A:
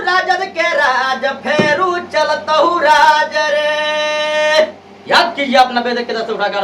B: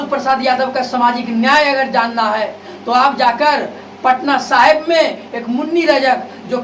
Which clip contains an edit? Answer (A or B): A